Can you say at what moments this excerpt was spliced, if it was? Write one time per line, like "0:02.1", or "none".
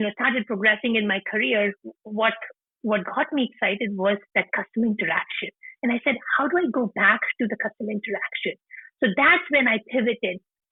none